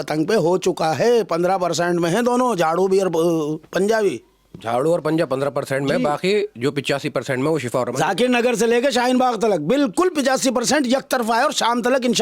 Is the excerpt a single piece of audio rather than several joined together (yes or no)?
yes